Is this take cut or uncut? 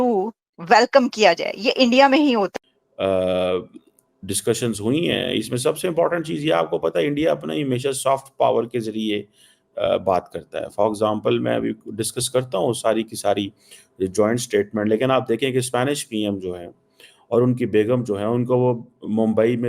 cut